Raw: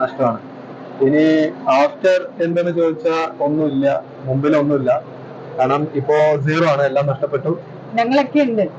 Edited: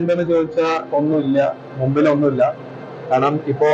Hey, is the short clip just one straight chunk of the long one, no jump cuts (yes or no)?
yes